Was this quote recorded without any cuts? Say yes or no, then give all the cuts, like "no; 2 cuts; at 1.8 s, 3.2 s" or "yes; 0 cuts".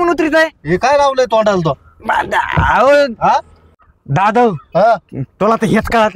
yes; 0 cuts